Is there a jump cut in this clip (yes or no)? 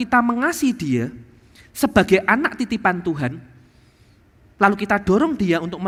no